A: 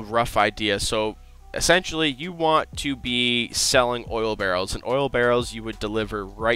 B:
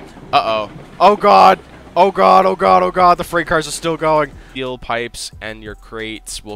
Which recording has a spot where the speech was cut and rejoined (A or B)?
B